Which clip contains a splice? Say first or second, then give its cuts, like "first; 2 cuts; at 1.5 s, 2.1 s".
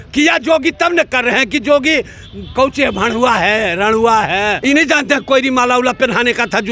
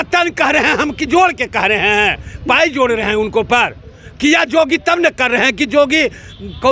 first; 1 cut; at 4.6 s